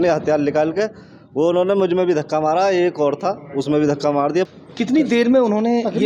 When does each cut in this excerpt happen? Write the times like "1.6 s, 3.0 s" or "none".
4.5 s